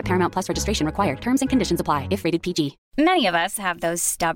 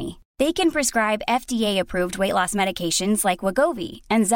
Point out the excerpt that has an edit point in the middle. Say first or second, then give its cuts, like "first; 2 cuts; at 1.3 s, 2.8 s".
first; 1 cut; at 2.8 s